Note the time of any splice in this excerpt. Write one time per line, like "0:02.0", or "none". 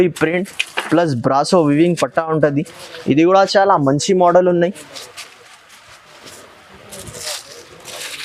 none